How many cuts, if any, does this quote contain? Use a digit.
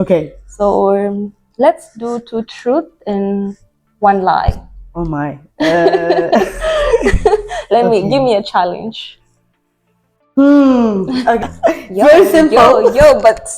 1